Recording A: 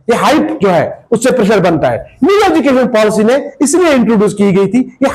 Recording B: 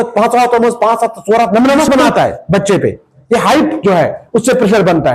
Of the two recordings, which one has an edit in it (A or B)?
B